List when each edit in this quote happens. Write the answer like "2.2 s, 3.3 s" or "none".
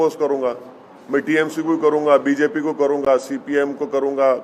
none